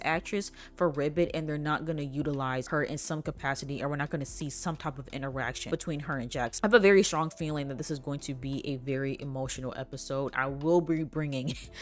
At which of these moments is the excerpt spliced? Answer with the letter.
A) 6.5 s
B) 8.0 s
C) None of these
A